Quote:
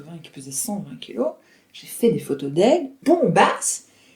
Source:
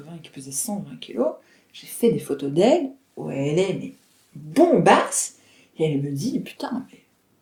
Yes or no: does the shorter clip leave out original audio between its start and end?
yes